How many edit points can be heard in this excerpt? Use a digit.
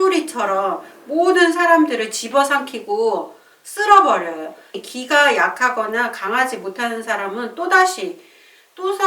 1